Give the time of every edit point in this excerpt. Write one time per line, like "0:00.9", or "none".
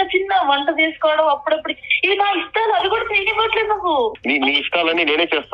0:04.2